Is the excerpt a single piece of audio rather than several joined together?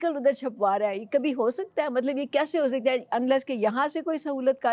yes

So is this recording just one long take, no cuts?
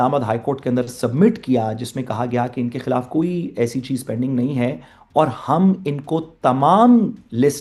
yes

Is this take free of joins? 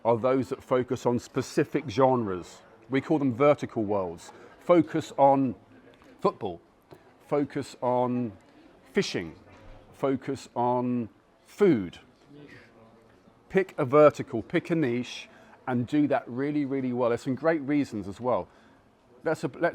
yes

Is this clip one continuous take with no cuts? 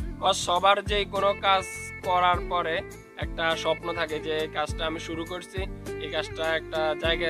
yes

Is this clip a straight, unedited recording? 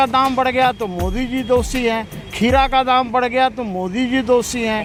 yes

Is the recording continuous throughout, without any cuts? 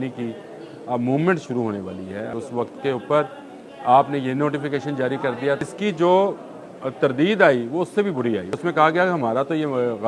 no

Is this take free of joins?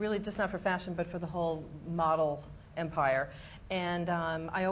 no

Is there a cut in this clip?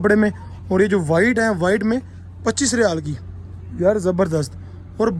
no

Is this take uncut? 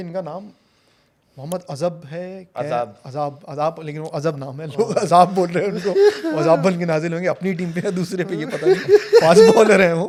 yes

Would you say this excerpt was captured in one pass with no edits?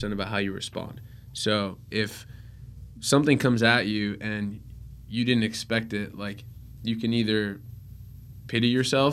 yes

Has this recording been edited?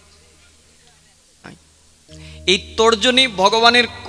yes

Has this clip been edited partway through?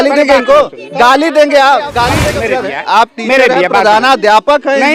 yes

